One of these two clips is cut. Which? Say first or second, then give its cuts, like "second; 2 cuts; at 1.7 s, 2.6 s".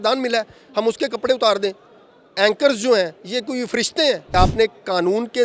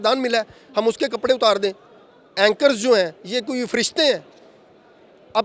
first; 1 cut; at 4.3 s